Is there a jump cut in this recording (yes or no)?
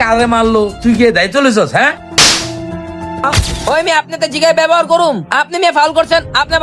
yes